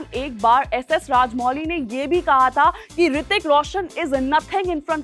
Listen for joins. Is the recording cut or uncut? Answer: uncut